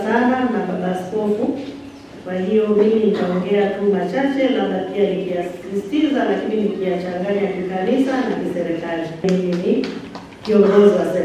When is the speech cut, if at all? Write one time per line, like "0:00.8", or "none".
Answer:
0:09.2